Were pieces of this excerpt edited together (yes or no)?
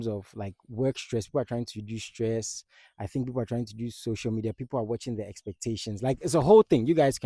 no